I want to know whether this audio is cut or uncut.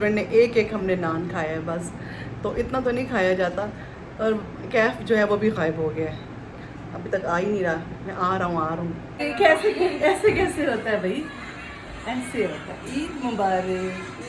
uncut